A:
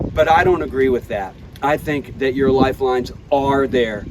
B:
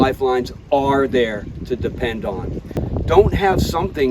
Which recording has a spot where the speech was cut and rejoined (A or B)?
B